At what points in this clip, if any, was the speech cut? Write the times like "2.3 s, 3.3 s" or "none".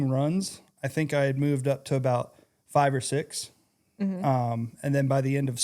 none